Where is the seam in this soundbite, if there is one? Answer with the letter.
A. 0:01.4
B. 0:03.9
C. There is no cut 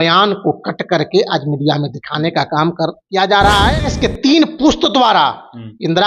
B